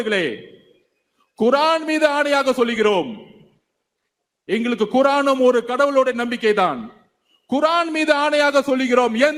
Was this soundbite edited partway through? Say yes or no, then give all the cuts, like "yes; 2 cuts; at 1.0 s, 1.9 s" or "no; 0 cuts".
no; 0 cuts